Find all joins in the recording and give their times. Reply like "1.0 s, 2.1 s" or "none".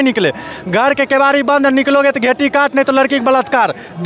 none